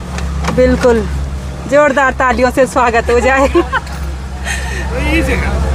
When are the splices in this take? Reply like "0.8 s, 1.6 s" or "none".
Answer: none

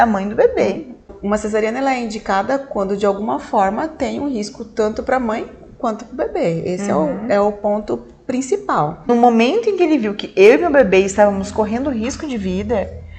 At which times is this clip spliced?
1.2 s, 9.1 s

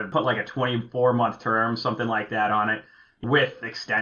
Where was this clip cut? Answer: none

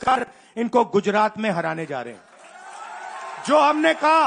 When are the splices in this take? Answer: none

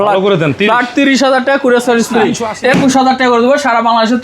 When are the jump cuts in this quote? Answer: 2.5 s

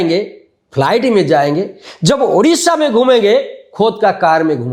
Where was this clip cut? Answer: none

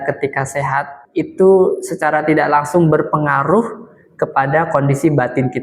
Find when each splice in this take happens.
1.0 s

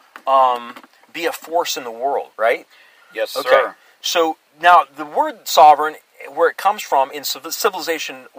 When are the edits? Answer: 2.3 s

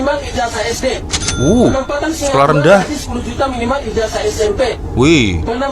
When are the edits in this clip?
none

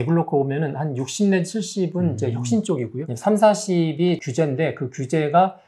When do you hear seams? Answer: 3.0 s, 4.2 s

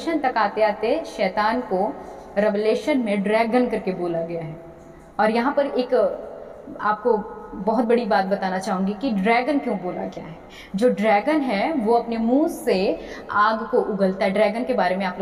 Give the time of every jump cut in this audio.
none

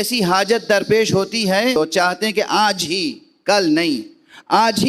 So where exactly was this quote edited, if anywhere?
1.8 s

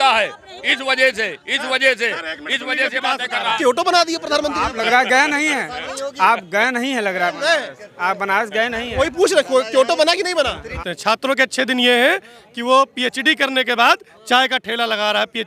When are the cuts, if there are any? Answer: 3.6 s, 10.7 s

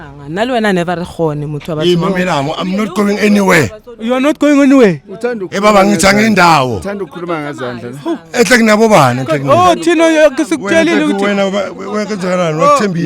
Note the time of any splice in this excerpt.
none

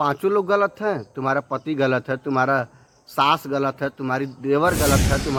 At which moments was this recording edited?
none

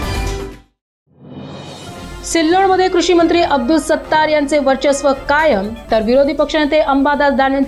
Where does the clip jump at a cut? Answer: 2.0 s

